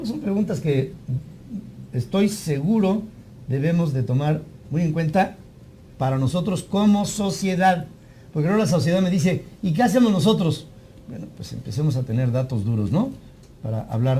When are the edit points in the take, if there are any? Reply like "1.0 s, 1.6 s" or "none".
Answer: 10.2 s